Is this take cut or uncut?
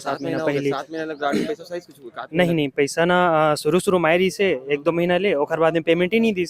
uncut